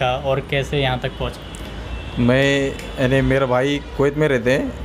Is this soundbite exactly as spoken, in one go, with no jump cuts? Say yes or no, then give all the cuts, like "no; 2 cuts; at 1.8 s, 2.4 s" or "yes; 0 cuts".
yes; 0 cuts